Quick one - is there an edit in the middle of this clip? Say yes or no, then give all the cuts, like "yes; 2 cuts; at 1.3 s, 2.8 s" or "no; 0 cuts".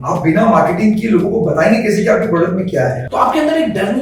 yes; 1 cut; at 3.0 s